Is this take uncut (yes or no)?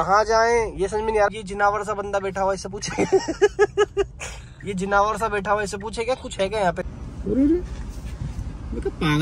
no